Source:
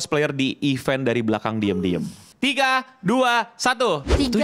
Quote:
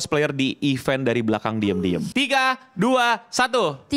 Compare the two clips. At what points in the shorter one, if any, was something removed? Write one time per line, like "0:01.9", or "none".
0:02.1